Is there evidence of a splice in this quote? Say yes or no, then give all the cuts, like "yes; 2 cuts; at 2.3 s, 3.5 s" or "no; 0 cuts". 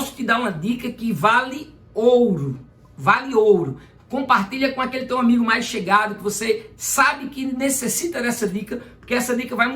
no; 0 cuts